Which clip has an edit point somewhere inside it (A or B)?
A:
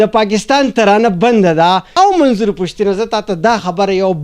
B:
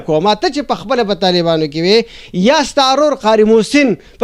A